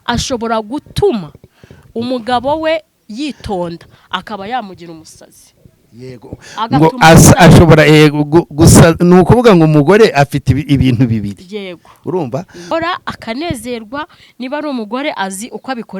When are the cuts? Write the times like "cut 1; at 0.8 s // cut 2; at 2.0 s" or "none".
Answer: cut 1; at 12.7 s